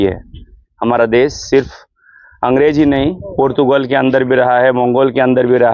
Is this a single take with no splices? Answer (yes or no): yes